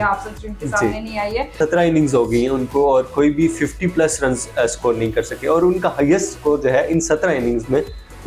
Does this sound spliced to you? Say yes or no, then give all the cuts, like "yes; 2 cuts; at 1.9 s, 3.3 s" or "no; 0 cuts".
yes; 1 cut; at 1.6 s